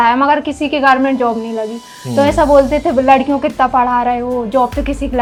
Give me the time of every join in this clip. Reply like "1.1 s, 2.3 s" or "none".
none